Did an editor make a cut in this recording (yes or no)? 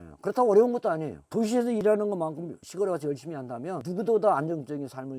yes